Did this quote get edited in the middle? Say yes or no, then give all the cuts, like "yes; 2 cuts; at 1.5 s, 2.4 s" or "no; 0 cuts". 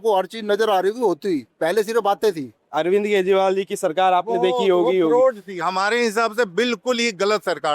yes; 2 cuts; at 1.5 s, 2.6 s